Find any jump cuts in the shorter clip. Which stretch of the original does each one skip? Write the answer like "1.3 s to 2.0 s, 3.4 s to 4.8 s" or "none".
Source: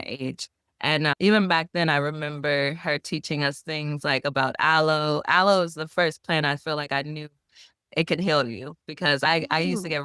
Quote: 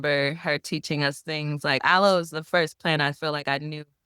4.2 s to 5.2 s

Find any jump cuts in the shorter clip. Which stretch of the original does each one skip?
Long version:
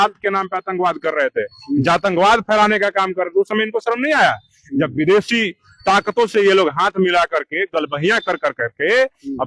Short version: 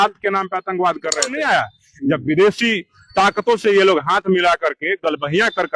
1.3 s to 4.0 s

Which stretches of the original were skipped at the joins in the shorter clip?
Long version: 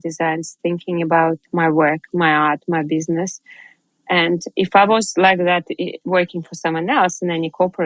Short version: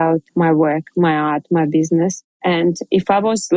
3.4 s to 3.9 s

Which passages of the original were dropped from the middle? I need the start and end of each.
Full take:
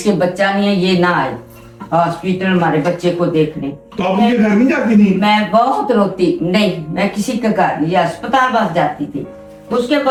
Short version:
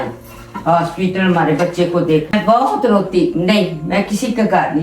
3.6 s to 5.4 s

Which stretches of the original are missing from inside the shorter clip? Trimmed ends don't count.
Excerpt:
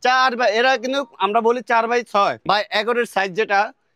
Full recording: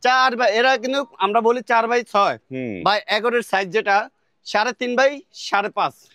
2.4 s to 2.8 s

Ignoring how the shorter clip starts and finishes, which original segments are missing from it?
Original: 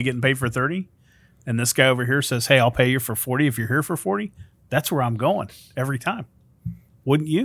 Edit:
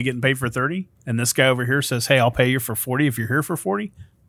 0.9 s to 1.4 s

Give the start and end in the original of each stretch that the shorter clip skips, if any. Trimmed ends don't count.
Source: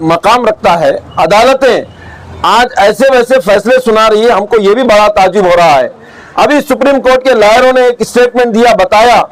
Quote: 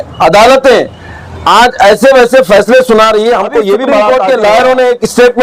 5.0 s to 7.0 s

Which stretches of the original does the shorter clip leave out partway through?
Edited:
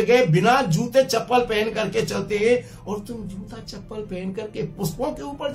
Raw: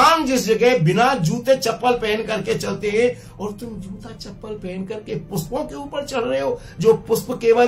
none

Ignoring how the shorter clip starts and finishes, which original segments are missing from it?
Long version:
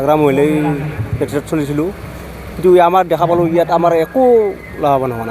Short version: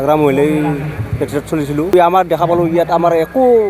1.9 s to 2.7 s

